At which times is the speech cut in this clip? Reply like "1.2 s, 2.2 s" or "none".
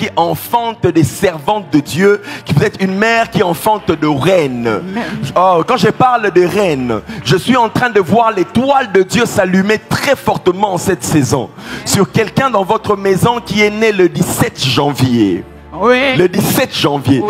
none

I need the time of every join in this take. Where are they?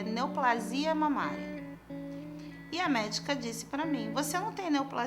1.9 s

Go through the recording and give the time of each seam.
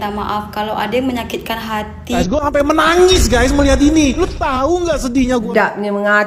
2.2 s, 5.5 s

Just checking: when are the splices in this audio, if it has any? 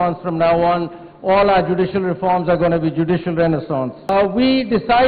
4.1 s

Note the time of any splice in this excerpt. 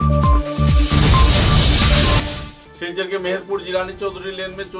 2.2 s

